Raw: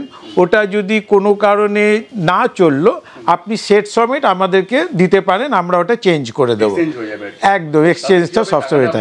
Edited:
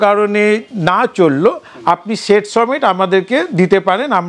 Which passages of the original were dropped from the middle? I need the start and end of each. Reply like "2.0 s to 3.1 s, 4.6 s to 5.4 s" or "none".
none

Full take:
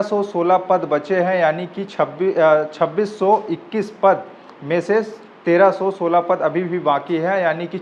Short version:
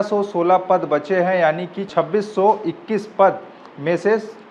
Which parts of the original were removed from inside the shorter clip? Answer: 1.9 s to 2.7 s

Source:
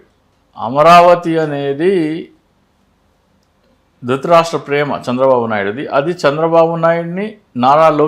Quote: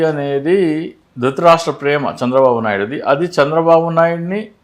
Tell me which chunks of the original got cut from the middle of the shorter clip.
2.3 s to 3.9 s

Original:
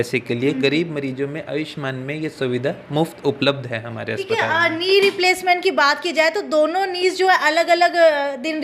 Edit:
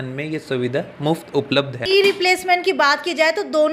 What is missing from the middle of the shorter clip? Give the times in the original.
3.7 s to 4.8 s

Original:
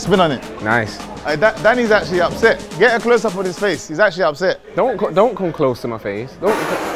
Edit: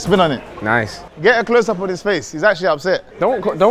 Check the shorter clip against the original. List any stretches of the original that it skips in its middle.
1.1 s to 2.7 s

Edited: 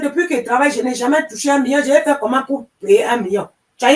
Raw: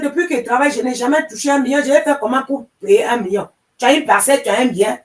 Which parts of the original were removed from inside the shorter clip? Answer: none

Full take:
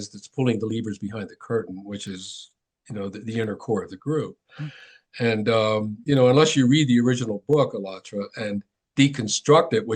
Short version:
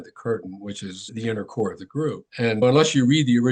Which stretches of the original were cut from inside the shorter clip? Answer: 2.3 s to 3.2 s, 4.7 s to 6.2 s

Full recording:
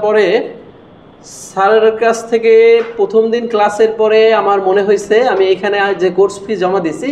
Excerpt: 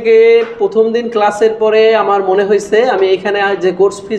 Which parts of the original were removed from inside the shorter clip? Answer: none

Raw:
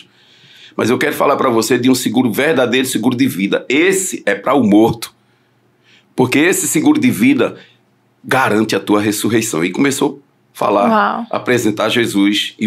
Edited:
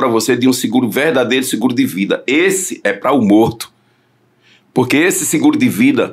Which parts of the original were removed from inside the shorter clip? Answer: none

